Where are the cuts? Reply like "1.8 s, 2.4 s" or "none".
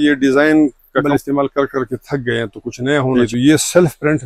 1.0 s, 3.2 s